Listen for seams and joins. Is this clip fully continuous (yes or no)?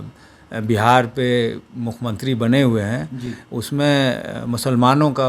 yes